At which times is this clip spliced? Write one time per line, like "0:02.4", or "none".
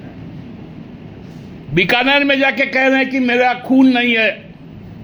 none